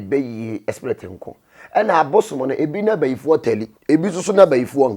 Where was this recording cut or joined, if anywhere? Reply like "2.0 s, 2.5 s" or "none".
3.7 s